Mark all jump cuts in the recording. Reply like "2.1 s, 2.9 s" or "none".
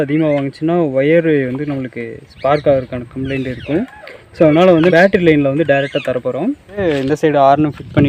4.9 s, 6.8 s